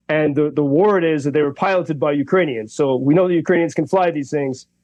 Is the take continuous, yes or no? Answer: yes